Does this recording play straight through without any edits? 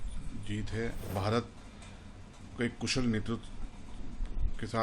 no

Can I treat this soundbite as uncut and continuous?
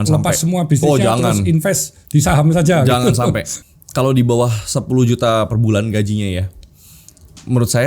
no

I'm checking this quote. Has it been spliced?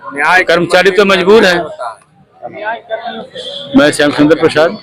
no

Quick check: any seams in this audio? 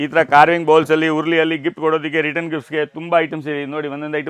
no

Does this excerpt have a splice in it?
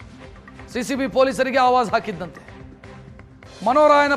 no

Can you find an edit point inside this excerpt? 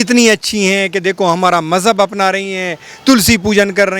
no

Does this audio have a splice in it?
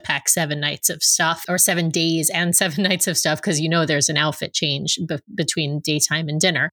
yes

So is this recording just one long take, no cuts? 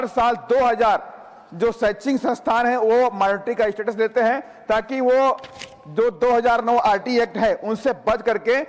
yes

